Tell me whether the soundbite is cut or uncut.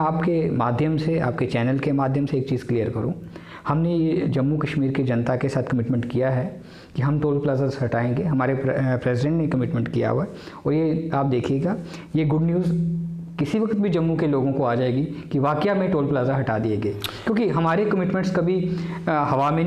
uncut